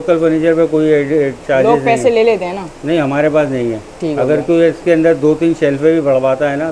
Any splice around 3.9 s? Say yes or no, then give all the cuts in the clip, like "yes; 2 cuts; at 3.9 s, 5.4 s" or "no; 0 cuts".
no; 0 cuts